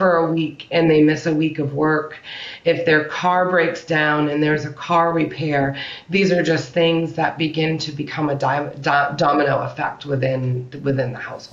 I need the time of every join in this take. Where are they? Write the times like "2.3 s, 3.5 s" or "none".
none